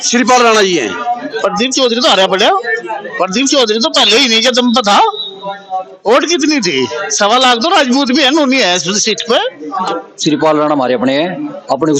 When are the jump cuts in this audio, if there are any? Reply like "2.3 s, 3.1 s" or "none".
1.3 s, 9.9 s